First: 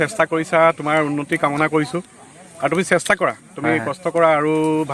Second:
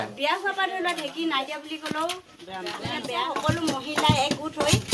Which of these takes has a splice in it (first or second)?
second